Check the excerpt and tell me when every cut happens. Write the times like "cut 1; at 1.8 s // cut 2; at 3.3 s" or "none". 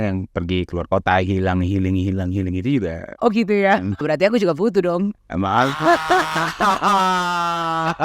cut 1; at 4.0 s